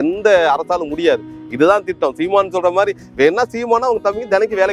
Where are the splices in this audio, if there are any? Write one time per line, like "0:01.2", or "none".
none